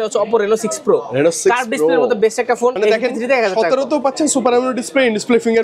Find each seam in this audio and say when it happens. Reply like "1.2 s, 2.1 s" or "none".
2.8 s